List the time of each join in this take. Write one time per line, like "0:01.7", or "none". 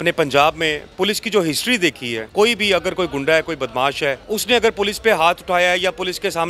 0:02.2
0:04.2